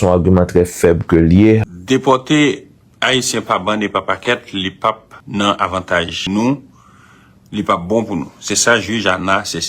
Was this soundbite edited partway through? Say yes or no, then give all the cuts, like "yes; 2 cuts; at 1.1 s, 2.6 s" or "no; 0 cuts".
yes; 3 cuts; at 1.6 s, 5.1 s, 6.2 s